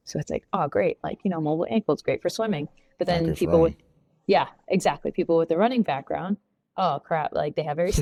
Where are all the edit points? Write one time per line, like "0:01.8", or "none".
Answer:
none

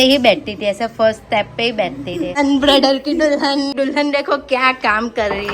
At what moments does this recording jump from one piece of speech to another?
0:02.4
0:03.7

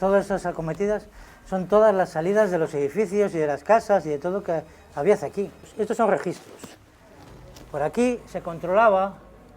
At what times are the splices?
none

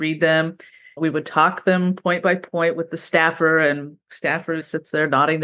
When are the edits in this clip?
0:01.0

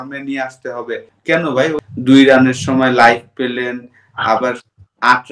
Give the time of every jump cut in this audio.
0:01.1
0:01.8

